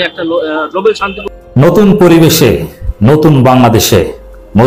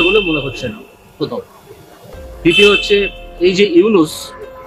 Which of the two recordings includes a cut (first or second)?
first